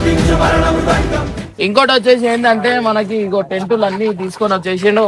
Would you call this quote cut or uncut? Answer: cut